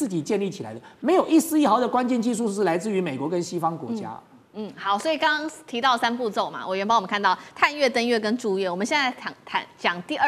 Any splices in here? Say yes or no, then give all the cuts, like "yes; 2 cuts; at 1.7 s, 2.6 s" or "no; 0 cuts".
no; 0 cuts